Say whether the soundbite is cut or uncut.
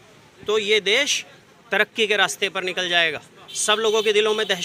uncut